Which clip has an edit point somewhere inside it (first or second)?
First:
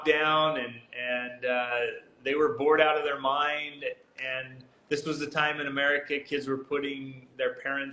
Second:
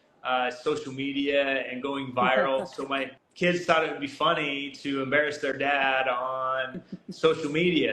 second